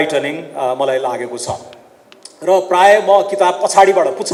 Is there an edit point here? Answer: no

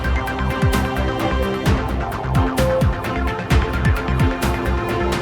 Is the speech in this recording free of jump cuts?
no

